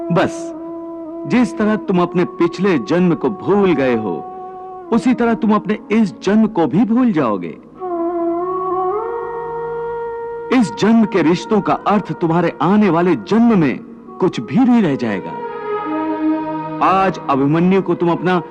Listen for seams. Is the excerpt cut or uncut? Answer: uncut